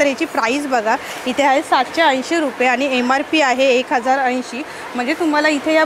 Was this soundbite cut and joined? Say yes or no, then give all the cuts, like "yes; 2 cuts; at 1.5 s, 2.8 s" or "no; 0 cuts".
no; 0 cuts